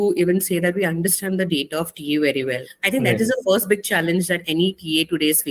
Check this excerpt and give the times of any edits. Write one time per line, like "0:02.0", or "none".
0:02.7